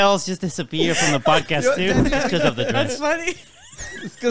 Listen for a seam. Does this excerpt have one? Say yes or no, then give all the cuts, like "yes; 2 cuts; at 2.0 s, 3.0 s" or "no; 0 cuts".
yes; 1 cut; at 2.0 s